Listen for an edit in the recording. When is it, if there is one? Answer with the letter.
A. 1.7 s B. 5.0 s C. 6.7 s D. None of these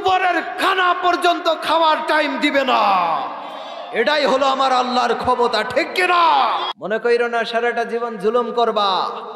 C